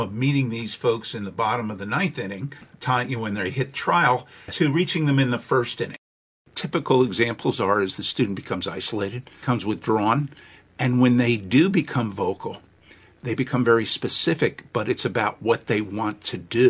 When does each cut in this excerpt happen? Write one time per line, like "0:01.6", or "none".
0:02.6
0:04.5
0:06.1
0:09.3
0:13.2

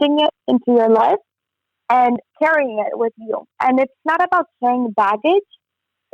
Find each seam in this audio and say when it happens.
0:02.3

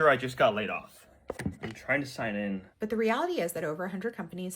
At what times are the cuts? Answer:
0:02.7

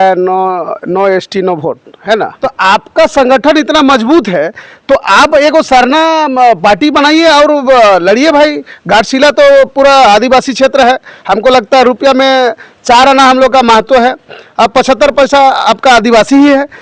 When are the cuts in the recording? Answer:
0:02.3

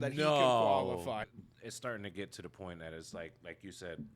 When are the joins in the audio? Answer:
0:01.3

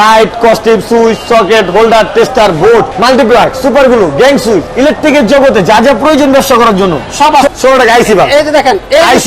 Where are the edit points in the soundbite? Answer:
0:02.9
0:04.7
0:07.5

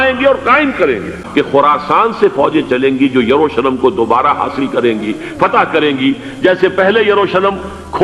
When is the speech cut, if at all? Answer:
0:01.2

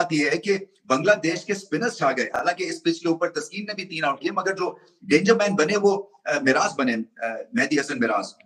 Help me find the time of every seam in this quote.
none

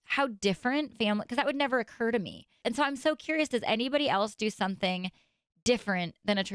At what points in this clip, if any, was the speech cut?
0:02.5

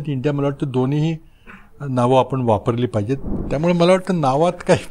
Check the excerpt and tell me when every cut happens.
0:03.4

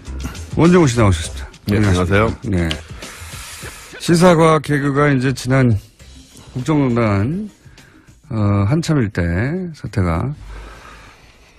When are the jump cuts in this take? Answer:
none

